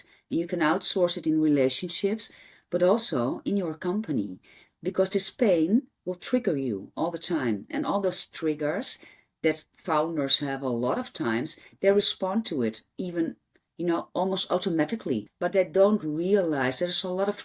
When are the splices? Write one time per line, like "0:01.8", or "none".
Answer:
0:15.3